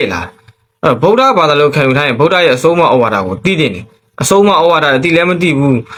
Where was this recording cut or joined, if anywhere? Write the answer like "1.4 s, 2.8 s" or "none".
none